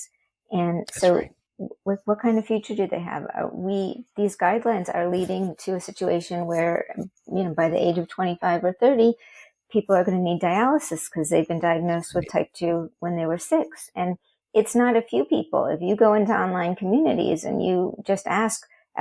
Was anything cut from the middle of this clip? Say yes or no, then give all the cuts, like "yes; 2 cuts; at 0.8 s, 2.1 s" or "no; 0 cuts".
no; 0 cuts